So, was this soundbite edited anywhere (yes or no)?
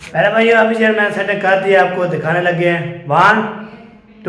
no